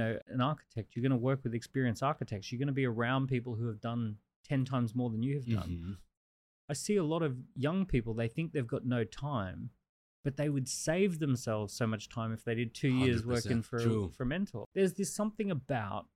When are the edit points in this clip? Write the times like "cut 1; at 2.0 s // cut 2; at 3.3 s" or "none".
cut 1; at 14.7 s